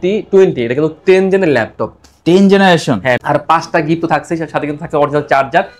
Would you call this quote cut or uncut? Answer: cut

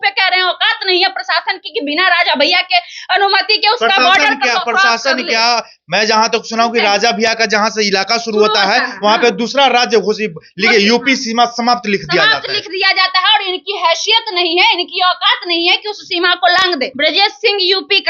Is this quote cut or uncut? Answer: cut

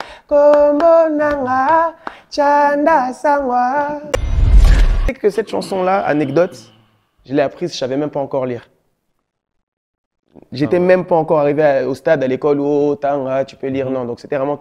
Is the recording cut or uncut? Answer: cut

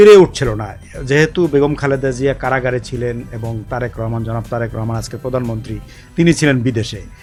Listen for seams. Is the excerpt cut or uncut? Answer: uncut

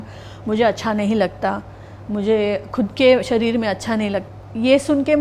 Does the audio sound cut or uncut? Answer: cut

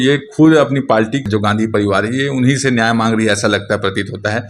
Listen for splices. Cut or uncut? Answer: cut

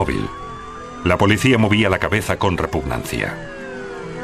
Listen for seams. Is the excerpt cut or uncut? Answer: uncut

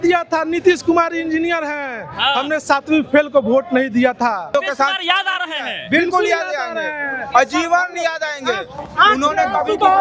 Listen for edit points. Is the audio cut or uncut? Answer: cut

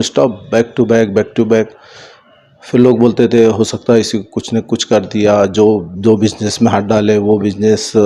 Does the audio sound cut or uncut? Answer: uncut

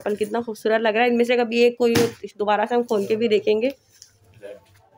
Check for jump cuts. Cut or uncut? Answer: uncut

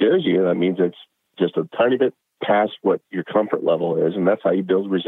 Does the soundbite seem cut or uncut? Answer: cut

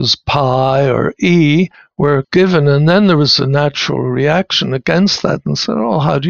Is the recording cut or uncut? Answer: cut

